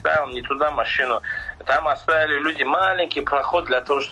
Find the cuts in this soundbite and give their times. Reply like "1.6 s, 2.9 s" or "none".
none